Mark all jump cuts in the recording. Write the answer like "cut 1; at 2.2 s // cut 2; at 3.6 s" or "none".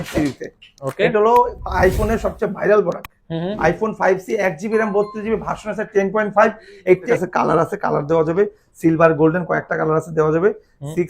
cut 1; at 7.1 s